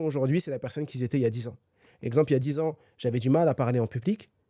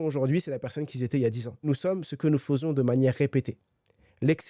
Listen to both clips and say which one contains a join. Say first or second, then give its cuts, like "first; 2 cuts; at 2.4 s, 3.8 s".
second; 1 cut; at 1.7 s